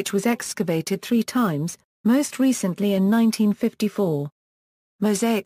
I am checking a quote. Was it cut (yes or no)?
no